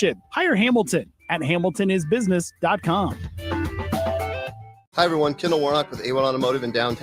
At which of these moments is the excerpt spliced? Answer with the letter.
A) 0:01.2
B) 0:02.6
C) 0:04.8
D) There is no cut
C